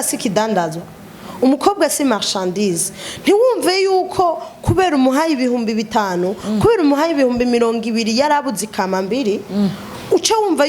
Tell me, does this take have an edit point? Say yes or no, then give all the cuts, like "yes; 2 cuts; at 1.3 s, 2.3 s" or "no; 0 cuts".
no; 0 cuts